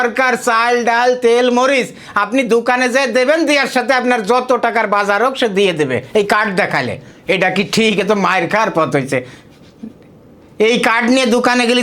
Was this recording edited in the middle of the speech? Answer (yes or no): no